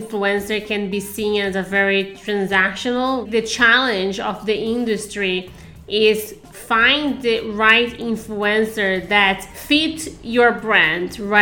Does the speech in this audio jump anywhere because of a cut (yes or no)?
yes